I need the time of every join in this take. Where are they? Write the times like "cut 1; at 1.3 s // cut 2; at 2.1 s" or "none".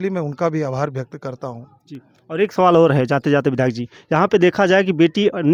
none